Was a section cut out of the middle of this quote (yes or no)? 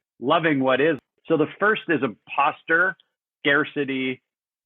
yes